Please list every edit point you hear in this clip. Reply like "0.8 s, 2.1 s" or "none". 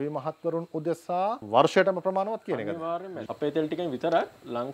1.4 s, 3.1 s